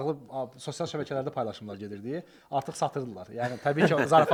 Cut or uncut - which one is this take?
uncut